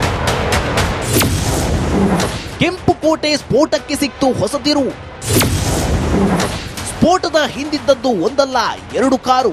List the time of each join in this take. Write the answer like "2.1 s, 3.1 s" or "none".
1.0 s